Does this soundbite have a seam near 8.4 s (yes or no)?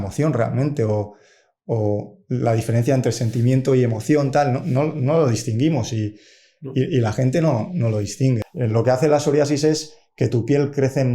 yes